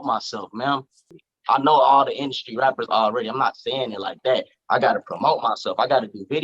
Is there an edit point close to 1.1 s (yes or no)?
yes